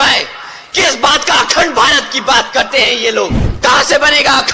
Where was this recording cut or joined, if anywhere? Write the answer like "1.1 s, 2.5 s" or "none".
3.4 s